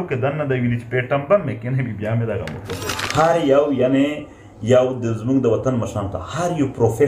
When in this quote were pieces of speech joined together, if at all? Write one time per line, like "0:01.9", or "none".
0:03.0